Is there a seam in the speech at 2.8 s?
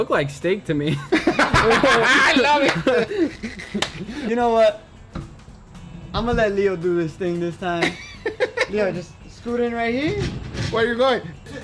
no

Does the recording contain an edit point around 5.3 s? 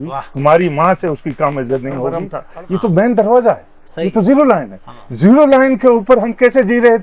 no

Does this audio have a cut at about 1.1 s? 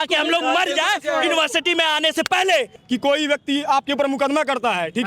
no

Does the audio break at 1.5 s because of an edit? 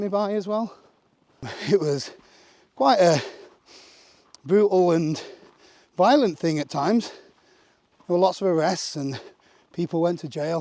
yes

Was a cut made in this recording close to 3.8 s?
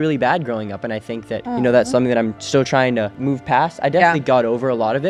no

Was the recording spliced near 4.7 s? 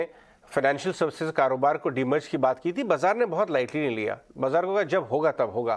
no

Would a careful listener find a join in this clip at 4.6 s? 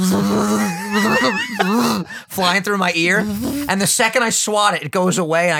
no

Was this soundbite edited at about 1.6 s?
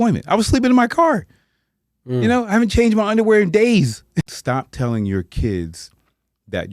no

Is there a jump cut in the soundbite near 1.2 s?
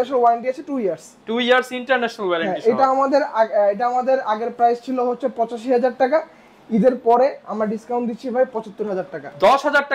no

